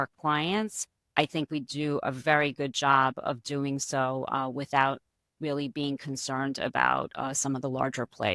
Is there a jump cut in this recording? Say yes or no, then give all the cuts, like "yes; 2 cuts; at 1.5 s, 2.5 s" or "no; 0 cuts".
no; 0 cuts